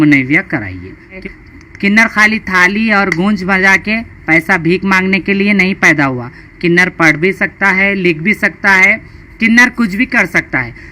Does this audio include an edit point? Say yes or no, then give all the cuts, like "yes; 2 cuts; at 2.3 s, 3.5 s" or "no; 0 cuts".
yes; 1 cut; at 1.2 s